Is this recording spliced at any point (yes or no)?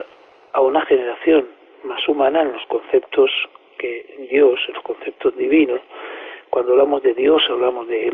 no